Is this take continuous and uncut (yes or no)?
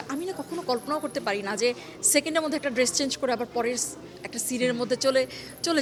yes